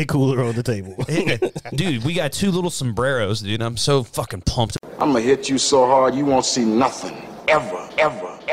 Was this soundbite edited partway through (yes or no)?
yes